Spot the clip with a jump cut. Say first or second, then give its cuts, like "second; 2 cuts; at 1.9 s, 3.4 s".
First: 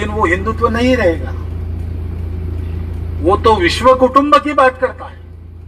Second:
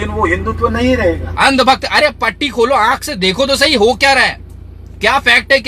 second; 1 cut; at 1.3 s